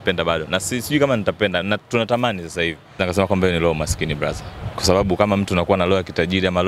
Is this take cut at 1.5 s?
no; 1 cut; at 3.0 s

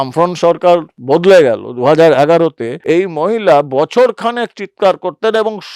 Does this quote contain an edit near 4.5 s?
no; 2 cuts; at 0.9 s, 2.7 s

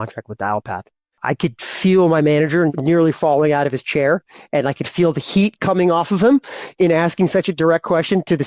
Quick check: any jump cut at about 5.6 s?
no; 2 cuts; at 1.2 s, 2.7 s

